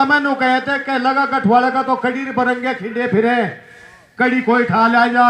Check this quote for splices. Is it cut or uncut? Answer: uncut